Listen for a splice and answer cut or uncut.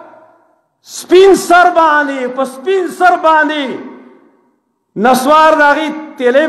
uncut